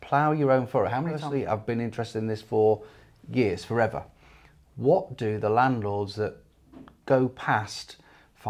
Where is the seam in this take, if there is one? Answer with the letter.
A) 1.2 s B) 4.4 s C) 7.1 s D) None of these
A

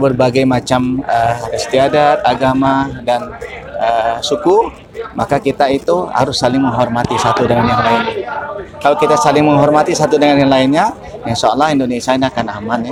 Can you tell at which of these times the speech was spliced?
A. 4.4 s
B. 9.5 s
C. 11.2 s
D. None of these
D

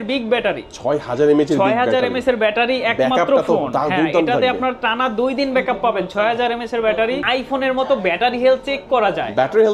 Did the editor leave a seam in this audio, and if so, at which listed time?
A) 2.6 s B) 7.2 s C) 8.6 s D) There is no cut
B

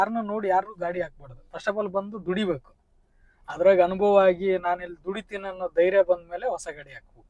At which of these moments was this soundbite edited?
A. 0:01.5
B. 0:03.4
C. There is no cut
C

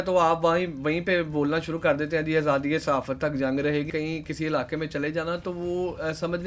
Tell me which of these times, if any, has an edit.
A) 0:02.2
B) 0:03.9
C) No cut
B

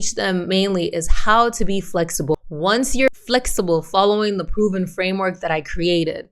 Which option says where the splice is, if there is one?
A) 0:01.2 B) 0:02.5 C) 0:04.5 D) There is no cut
B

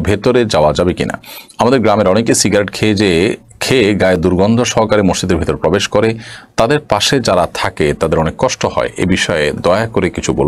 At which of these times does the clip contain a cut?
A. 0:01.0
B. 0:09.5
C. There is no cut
C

